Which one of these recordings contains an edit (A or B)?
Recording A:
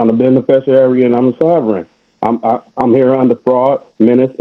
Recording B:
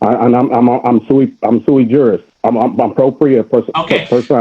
B